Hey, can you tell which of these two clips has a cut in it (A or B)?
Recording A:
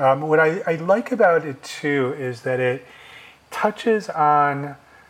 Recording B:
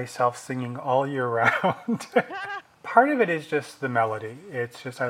B